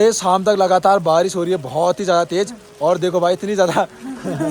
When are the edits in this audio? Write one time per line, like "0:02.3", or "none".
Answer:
none